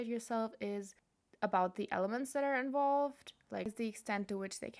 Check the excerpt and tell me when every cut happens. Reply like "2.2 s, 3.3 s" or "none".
3.7 s